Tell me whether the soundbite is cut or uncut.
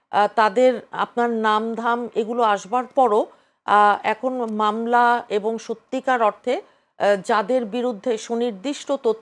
uncut